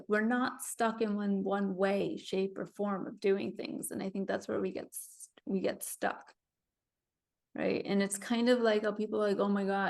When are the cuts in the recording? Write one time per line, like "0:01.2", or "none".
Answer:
none